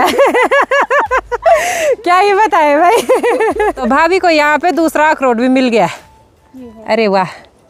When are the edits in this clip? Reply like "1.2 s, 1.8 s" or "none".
none